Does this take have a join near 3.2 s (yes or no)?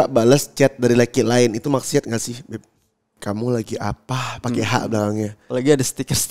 yes